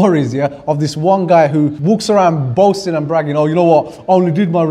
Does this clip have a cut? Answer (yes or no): yes